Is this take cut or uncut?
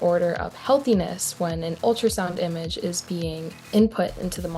cut